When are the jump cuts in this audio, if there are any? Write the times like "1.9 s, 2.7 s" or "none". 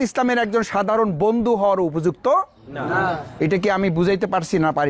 none